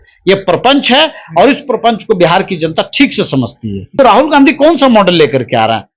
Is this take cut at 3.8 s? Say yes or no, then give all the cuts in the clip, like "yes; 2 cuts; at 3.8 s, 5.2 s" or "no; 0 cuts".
yes; 1 cut; at 3.8 s